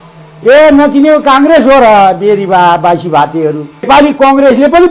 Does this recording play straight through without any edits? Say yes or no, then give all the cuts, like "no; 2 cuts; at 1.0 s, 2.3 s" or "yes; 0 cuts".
no; 1 cut; at 3.9 s